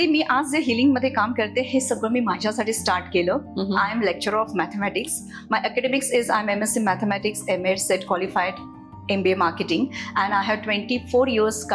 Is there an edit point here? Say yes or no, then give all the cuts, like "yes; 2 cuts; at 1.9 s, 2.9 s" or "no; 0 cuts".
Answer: no; 0 cuts